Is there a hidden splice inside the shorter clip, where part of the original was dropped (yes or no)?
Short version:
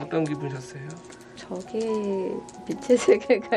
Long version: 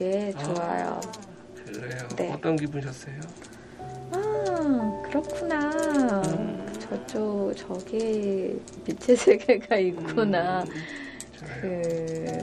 yes